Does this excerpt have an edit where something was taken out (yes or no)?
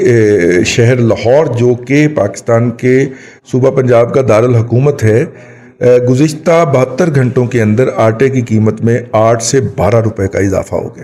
no